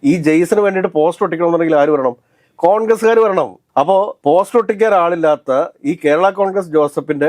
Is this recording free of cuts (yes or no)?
yes